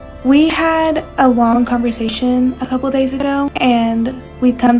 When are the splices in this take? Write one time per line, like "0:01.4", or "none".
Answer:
0:01.1
0:03.5